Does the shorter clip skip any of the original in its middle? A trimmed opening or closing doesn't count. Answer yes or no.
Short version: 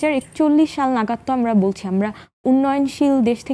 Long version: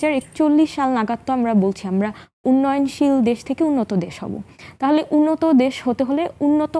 no